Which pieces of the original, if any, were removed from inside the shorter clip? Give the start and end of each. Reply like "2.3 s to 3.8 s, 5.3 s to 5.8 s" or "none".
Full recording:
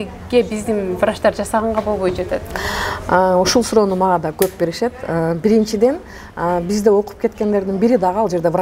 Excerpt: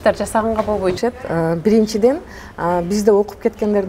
2.2 s to 4.8 s